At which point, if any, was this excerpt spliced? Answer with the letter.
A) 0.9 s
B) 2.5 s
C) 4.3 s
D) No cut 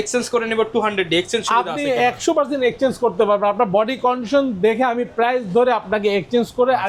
D